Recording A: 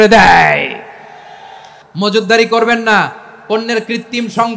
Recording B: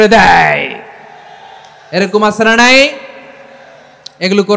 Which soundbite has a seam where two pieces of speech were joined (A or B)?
A